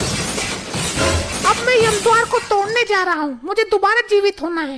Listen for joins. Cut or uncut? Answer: cut